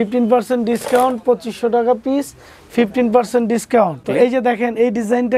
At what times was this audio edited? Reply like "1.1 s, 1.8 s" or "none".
4.0 s